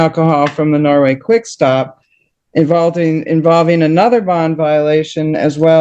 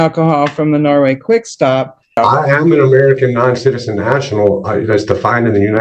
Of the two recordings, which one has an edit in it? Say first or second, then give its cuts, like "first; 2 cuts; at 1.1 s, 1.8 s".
second; 1 cut; at 2.1 s